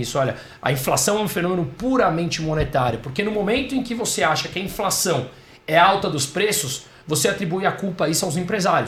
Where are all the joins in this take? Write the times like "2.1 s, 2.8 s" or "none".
none